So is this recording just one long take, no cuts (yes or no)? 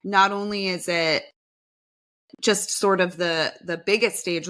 yes